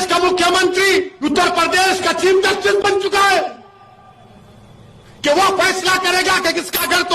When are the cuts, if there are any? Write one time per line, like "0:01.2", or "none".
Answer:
0:01.1